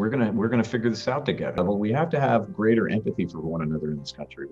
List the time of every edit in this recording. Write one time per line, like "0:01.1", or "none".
0:01.4